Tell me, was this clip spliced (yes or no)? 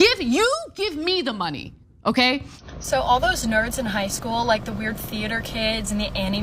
yes